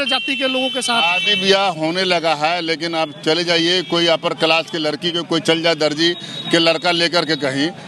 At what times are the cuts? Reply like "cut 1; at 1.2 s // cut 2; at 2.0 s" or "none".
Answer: none

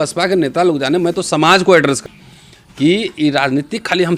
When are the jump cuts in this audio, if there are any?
cut 1; at 2.0 s

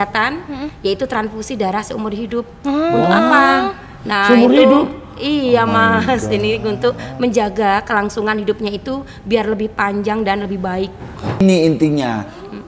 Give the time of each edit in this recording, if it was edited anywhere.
cut 1; at 11.4 s

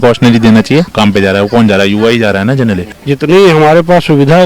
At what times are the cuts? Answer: cut 1; at 0.9 s // cut 2; at 2.9 s

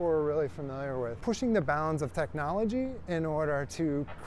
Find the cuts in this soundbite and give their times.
cut 1; at 1.2 s

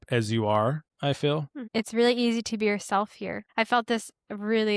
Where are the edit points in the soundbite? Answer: cut 1; at 0.9 s // cut 2; at 1.6 s // cut 3; at 3.4 s

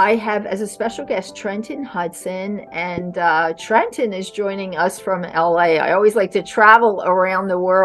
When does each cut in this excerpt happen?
none

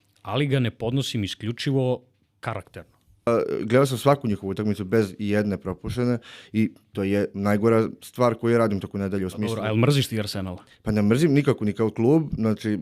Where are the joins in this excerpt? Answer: cut 1; at 3.3 s

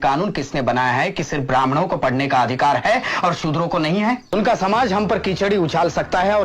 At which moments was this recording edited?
cut 1; at 4.3 s

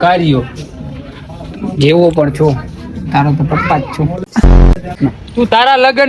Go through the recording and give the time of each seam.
cut 1; at 4.9 s

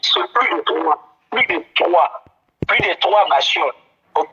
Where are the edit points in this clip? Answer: none

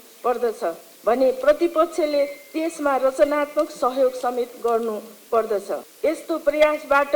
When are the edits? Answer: cut 1; at 5.9 s

